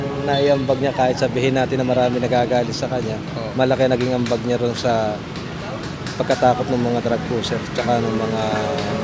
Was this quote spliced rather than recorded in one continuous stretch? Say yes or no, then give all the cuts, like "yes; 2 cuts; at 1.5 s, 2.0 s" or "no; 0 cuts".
no; 0 cuts